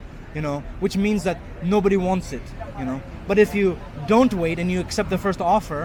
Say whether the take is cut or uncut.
uncut